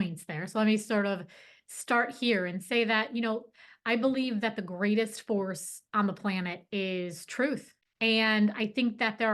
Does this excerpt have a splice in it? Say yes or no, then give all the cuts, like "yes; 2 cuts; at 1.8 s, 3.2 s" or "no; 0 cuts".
yes; 1 cut; at 7.8 s